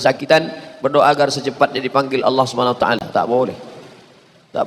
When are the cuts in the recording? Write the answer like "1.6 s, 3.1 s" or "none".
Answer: none